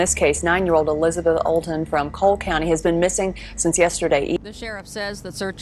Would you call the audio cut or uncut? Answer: cut